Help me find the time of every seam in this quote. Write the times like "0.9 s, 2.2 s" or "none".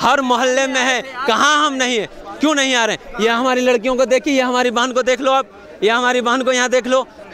none